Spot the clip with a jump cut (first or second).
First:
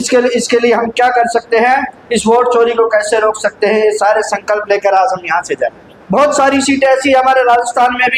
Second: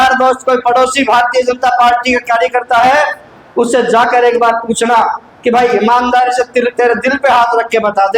first